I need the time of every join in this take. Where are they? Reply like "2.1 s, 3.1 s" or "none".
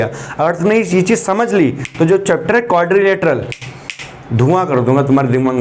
none